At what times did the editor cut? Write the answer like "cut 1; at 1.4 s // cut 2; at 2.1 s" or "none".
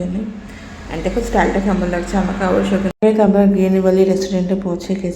cut 1; at 2.9 s